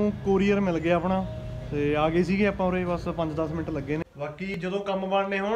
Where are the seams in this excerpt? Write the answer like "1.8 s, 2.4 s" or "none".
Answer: 4.5 s